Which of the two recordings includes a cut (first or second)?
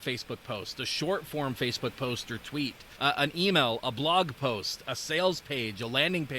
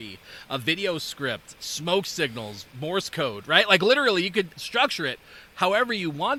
first